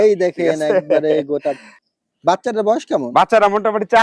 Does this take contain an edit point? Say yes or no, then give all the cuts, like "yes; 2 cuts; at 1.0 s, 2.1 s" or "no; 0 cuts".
yes; 1 cut; at 1.7 s